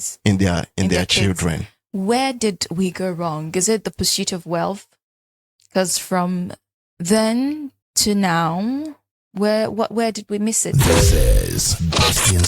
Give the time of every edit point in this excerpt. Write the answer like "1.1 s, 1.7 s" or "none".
10.7 s